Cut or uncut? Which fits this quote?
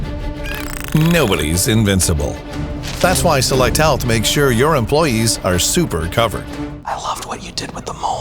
uncut